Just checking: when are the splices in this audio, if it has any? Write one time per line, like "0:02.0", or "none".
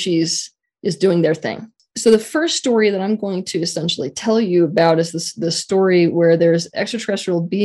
0:01.8